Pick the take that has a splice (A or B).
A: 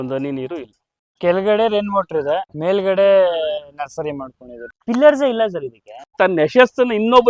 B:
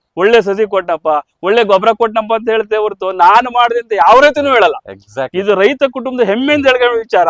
A